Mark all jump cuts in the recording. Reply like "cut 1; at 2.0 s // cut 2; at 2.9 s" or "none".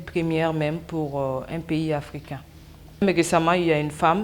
cut 1; at 2.9 s